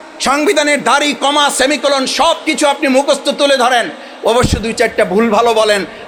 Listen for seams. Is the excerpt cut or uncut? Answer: uncut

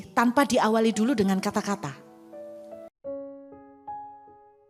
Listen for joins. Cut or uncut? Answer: uncut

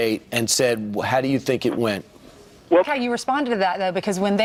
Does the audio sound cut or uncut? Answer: uncut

